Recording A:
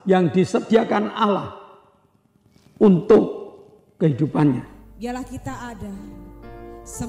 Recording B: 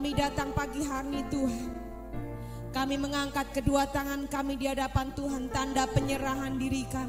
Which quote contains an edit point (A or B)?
A